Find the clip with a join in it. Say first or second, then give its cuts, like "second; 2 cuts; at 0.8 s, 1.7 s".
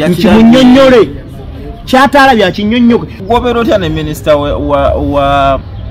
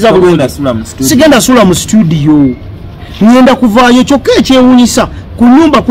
first; 1 cut; at 3.2 s